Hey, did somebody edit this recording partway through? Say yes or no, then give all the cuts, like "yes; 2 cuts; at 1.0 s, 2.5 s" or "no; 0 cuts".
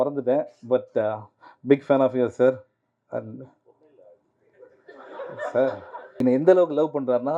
yes; 1 cut; at 6.0 s